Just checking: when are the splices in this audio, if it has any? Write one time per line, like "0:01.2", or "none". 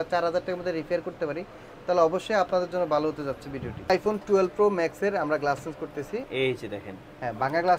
0:03.9
0:06.3